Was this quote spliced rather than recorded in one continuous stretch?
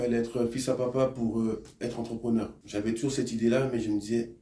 no; 0 cuts

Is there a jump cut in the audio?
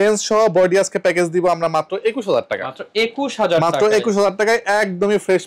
no; 0 cuts

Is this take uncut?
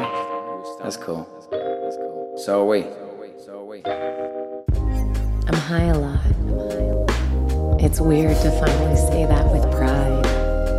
yes; 0 cuts

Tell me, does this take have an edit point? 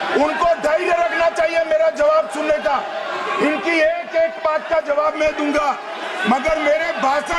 no; 0 cuts

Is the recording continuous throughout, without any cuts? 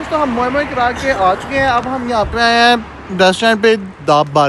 yes; 0 cuts

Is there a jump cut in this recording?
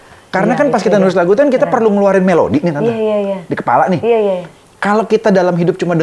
no; 0 cuts

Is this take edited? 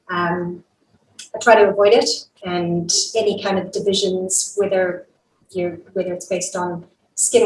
yes; 1 cut; at 2.3 s

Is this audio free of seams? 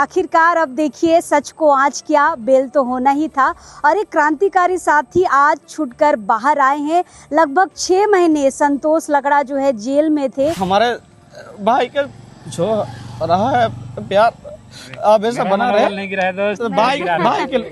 no; 1 cut; at 10.6 s

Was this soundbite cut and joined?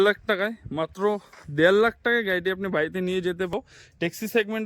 yes; 1 cut; at 3.5 s

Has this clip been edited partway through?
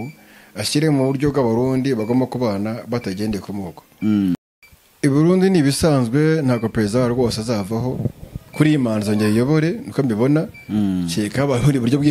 yes; 1 cut; at 4.4 s

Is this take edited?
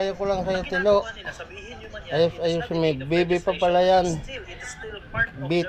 no; 0 cuts

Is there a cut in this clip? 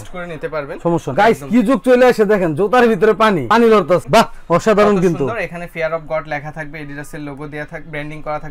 yes; 2 cuts; at 1.1 s, 4.0 s

